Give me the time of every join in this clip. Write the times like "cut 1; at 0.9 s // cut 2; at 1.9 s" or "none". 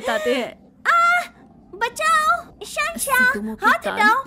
none